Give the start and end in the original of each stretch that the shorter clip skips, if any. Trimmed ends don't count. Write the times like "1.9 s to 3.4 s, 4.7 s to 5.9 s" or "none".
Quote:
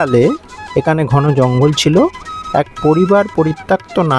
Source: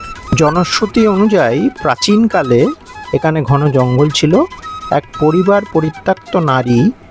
none